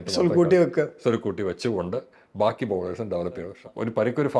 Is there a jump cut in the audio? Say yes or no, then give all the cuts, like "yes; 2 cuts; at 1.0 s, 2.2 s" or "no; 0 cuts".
yes; 1 cut; at 3.5 s